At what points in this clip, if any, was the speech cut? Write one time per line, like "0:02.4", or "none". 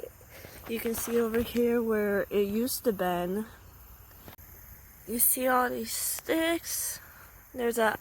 0:04.4